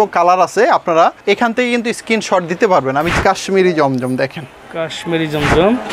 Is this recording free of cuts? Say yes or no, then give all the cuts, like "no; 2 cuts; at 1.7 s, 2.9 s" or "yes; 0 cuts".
no; 2 cuts; at 1.2 s, 3.1 s